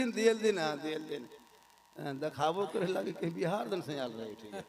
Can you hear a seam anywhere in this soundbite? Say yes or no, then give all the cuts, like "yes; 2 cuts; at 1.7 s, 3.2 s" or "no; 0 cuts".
no; 0 cuts